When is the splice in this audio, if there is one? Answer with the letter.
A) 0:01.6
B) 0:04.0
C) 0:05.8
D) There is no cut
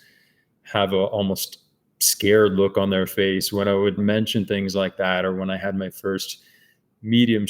B